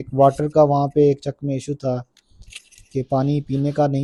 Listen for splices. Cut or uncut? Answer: uncut